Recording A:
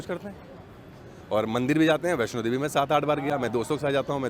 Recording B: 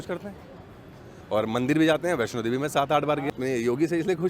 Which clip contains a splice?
B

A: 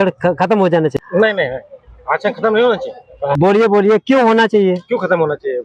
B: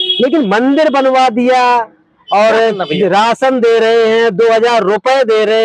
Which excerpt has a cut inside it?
A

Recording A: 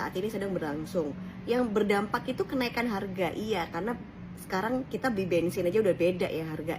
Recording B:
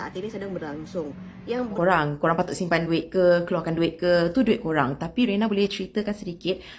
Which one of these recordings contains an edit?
B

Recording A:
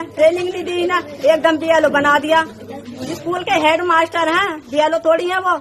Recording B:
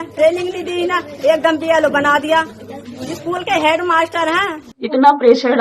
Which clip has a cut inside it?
B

